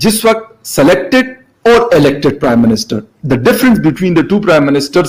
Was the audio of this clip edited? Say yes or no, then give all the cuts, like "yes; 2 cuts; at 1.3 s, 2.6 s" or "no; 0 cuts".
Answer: no; 0 cuts